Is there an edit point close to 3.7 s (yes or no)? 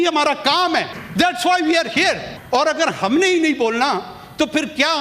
no